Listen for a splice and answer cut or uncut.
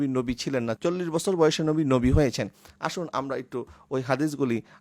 uncut